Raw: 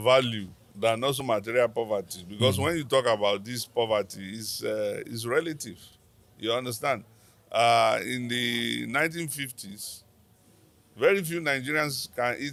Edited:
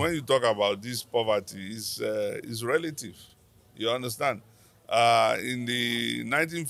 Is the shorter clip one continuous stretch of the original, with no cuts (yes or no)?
yes